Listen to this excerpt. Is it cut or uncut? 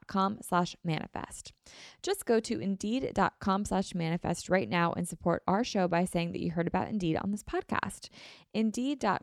uncut